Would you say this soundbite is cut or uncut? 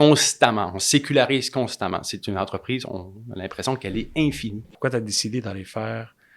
cut